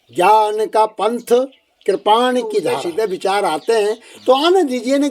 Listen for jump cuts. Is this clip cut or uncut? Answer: cut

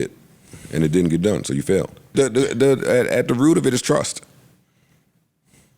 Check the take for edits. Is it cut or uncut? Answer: cut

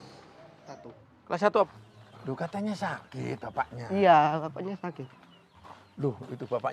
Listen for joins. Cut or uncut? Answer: cut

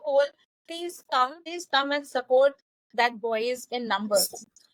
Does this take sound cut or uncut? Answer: uncut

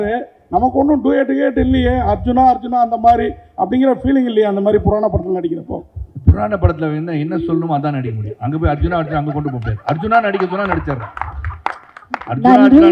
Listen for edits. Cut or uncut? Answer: uncut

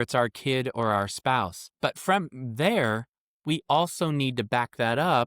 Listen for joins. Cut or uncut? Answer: cut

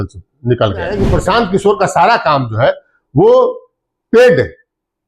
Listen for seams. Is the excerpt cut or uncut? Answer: cut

